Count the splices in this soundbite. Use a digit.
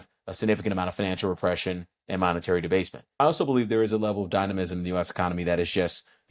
1